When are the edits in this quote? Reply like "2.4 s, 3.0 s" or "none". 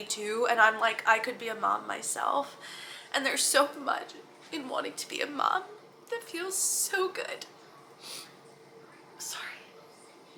none